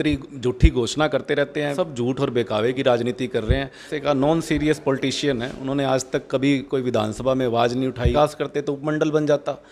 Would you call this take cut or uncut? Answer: cut